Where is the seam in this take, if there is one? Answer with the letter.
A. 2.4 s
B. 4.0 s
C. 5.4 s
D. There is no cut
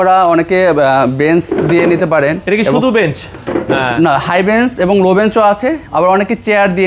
D